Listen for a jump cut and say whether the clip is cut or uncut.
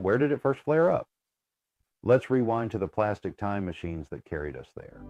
uncut